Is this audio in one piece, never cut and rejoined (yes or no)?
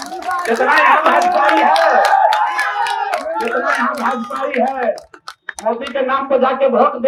yes